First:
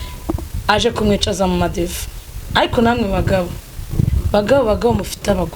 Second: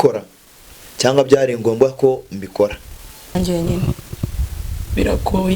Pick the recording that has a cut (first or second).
second